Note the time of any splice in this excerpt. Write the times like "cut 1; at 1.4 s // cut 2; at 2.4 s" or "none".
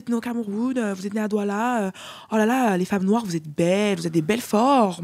none

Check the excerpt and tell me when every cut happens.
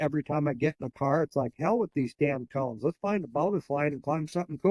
none

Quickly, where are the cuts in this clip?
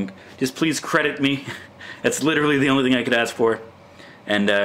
cut 1; at 1.3 s

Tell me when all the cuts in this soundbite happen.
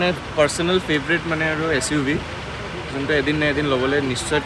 none

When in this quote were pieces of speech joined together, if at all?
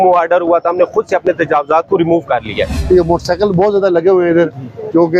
cut 1; at 2.8 s

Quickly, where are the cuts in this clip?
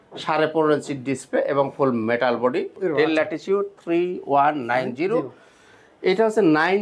cut 1; at 2.8 s

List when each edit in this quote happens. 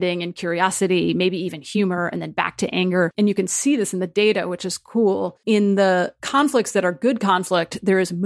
cut 1; at 3.1 s // cut 2; at 5.3 s // cut 3; at 6.2 s

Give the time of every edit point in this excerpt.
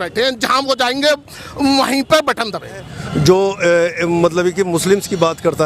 cut 1; at 2.9 s

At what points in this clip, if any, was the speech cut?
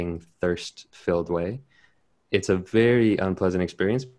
none

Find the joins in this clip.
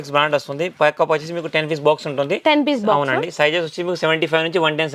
none

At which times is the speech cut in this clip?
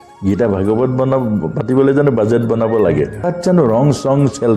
cut 1; at 3.2 s

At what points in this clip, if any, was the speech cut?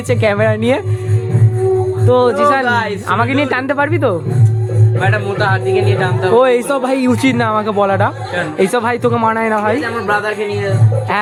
none

